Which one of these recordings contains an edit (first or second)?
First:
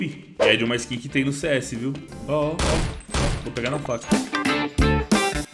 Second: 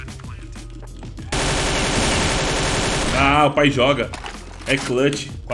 first